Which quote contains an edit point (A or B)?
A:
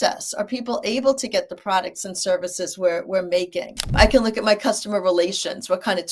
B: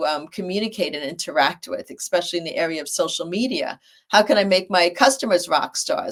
A